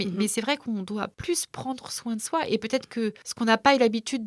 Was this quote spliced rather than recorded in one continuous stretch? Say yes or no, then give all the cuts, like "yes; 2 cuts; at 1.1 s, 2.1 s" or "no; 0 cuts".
yes; 2 cuts; at 1.2 s, 3.2 s